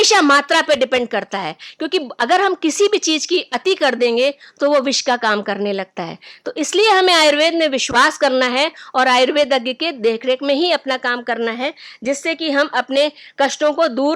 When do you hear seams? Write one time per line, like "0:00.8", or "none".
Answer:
none